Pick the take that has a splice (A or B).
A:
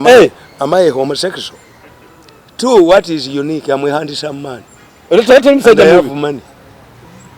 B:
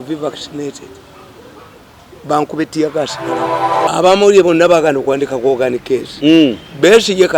B